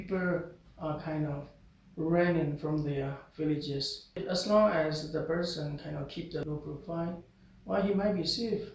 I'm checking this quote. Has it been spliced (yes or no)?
yes